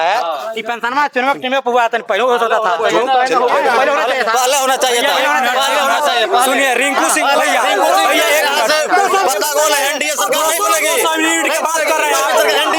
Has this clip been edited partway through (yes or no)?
no